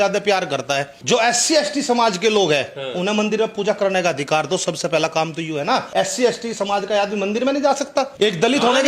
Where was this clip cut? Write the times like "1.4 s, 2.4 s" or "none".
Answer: 0.9 s, 5.9 s, 8.1 s